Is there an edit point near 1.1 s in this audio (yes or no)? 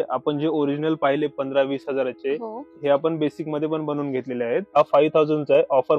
no